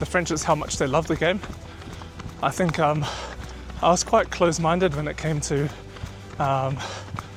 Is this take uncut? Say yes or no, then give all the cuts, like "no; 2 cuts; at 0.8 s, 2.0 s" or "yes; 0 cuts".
yes; 0 cuts